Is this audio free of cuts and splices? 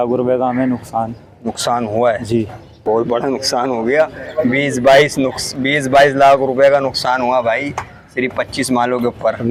yes; 0 cuts

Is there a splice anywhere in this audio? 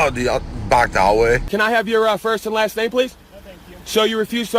yes; 1 cut; at 1.5 s

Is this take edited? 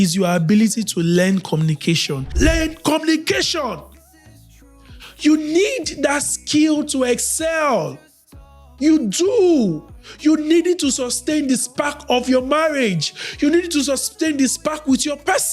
yes; 1 cut; at 2.3 s

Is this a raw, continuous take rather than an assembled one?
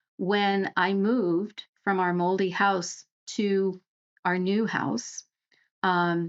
yes; 0 cuts

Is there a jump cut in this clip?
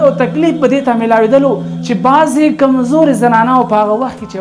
no; 0 cuts

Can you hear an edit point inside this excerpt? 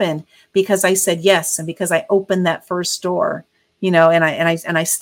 no; 0 cuts

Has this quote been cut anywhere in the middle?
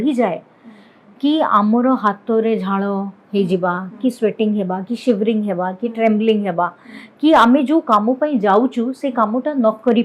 no; 0 cuts

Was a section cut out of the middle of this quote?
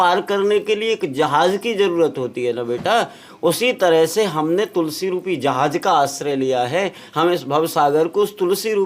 no; 0 cuts

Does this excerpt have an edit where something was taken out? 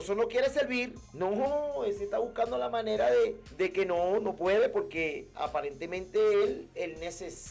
yes; 2 cuts; at 1.0 s, 3.4 s

